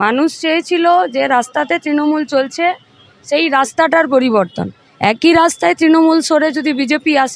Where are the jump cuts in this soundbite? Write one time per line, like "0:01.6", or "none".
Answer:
none